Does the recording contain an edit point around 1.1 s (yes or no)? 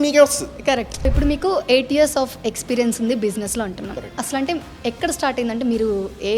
yes